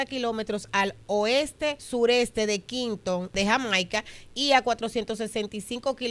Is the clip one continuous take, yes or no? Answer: no